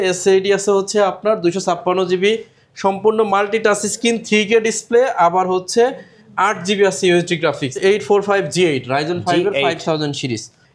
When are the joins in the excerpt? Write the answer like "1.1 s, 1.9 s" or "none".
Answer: 7.8 s